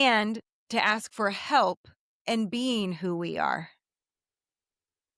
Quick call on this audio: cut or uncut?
uncut